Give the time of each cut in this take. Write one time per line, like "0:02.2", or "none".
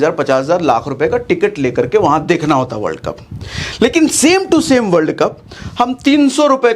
none